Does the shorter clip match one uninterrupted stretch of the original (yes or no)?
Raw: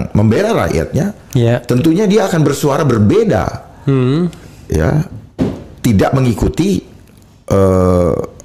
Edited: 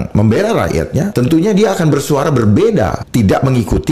no